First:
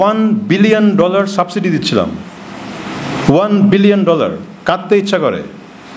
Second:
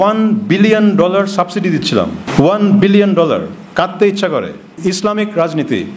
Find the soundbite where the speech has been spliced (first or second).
second